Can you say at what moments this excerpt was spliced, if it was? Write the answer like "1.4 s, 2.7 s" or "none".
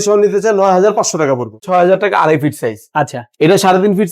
1.6 s